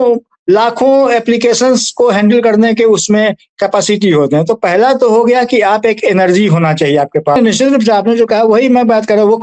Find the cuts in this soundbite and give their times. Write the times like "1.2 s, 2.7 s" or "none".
7.4 s